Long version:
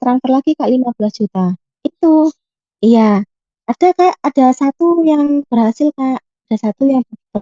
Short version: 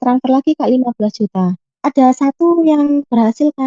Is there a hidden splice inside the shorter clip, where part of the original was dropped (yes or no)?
yes